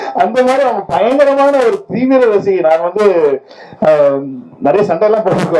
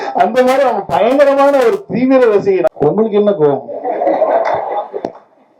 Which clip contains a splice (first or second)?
second